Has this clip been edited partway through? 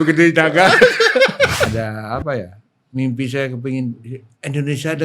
yes; 1 cut; at 1.7 s

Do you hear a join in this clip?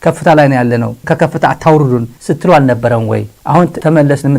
yes; 1 cut; at 3.3 s

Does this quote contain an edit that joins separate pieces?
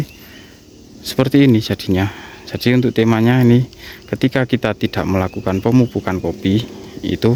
no; 0 cuts

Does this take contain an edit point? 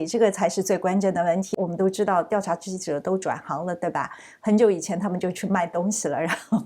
yes; 1 cut; at 1.5 s

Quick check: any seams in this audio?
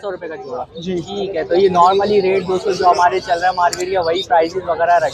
no; 0 cuts

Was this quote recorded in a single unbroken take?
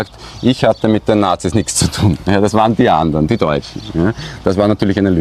yes; 0 cuts

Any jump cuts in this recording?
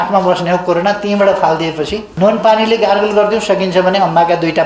yes; 1 cut; at 2.0 s

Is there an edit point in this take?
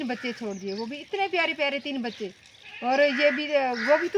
no; 0 cuts

